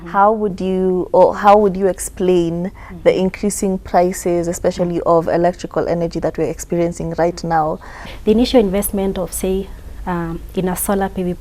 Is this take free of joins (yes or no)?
no